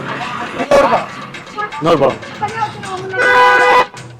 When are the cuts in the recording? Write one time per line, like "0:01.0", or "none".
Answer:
0:02.3